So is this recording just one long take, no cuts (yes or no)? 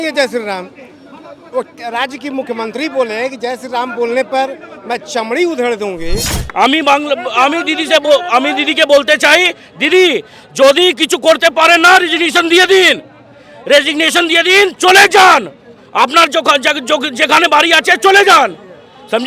no